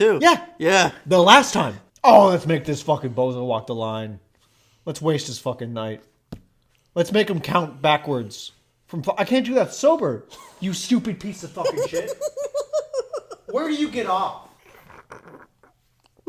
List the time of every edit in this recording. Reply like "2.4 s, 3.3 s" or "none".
1.8 s